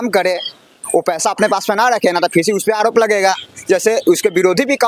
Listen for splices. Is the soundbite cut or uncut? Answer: uncut